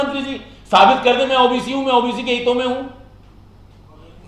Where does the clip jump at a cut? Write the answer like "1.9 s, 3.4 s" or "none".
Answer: none